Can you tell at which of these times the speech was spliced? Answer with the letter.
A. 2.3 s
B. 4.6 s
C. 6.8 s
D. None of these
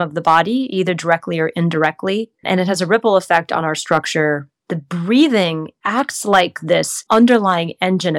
A